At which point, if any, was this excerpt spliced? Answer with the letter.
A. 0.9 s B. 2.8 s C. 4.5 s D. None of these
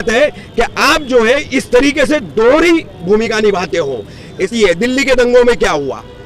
C